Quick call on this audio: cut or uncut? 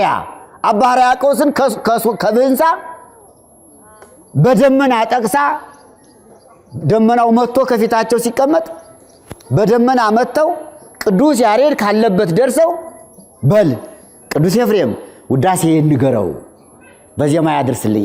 uncut